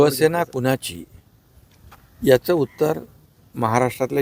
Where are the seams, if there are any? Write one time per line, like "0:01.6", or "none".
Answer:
none

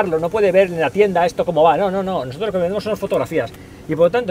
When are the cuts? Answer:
none

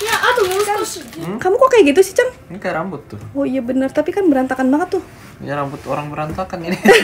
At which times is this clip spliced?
0:01.0

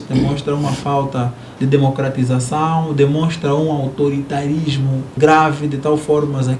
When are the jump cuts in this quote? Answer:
0:01.4
0:05.1

